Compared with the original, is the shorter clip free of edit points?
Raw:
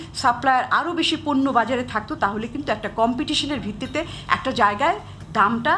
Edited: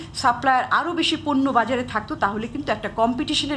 yes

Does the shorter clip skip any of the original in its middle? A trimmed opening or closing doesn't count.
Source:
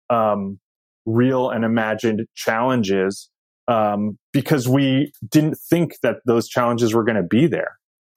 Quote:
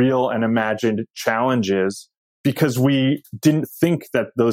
yes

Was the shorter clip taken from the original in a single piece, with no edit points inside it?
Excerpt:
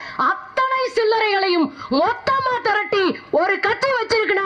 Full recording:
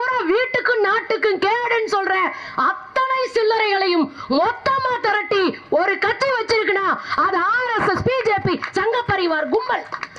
yes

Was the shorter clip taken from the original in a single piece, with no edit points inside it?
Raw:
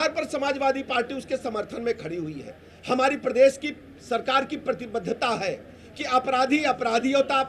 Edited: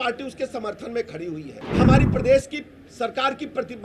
no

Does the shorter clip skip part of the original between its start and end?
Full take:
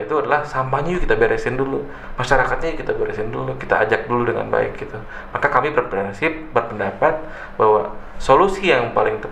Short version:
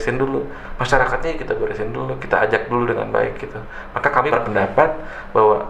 yes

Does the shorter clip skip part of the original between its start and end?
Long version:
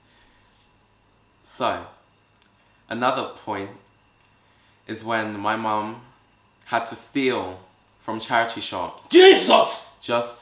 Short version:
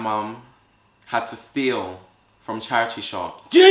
no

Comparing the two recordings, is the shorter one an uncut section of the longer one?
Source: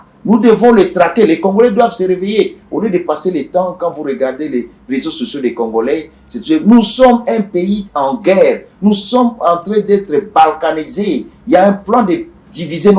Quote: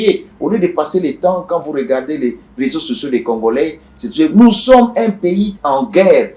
yes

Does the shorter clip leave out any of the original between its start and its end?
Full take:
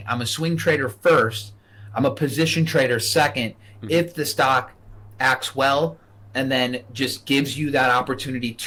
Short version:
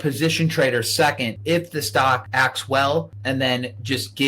yes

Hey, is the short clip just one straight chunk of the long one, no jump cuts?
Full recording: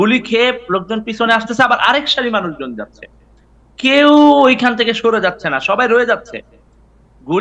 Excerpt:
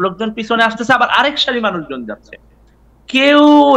yes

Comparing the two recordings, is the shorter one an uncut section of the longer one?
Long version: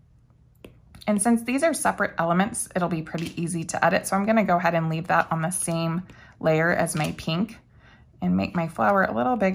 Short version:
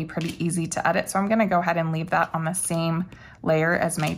yes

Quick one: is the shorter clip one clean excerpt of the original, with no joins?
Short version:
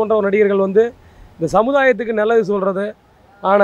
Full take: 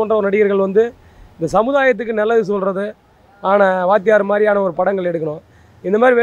yes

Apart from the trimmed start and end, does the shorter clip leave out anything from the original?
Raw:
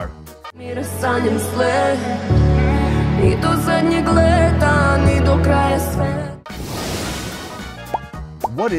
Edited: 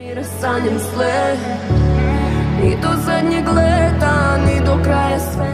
no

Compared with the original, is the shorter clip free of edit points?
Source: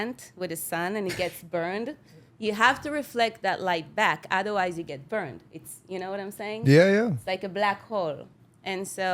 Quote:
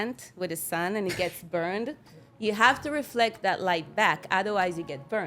yes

